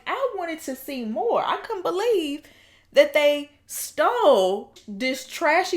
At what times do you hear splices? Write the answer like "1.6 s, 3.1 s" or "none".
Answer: 4.8 s